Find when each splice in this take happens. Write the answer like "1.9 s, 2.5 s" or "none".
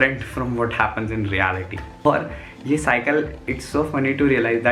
2.0 s